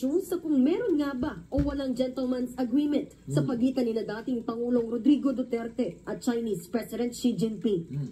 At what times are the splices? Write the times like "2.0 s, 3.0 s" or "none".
5.7 s, 6.9 s

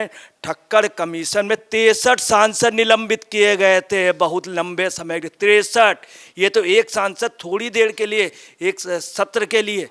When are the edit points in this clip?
none

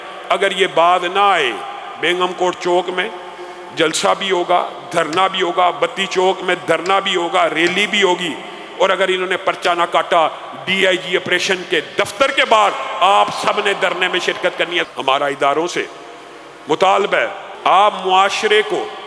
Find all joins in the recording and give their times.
14.8 s, 17.4 s

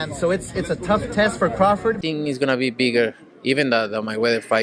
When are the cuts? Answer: 2.0 s

